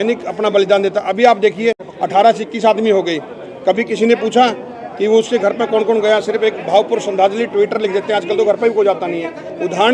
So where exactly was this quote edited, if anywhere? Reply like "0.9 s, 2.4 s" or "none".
none